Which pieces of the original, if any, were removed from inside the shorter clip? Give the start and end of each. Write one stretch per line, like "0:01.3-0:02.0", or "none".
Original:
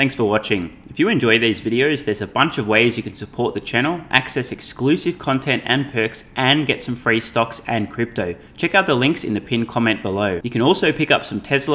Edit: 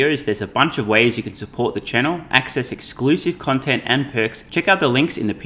0:06.2-0:08.5

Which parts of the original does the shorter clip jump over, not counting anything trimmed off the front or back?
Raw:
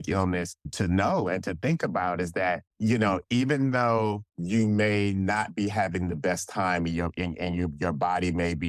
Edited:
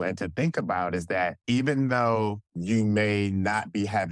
0:02.7-0:03.2

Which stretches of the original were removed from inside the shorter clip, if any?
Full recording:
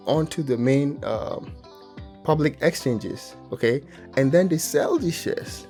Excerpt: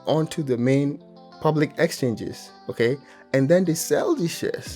0:01.0-0:01.8

